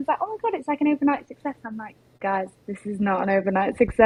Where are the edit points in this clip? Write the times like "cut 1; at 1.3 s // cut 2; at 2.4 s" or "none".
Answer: none